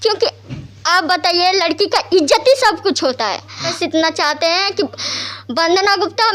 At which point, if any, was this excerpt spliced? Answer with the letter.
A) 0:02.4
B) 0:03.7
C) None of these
B